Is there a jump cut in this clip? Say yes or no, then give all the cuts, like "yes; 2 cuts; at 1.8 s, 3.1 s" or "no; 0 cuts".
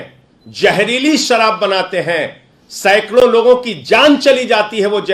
no; 0 cuts